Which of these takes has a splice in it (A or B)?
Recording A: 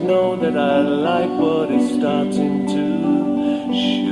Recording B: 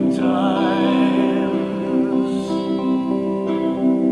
A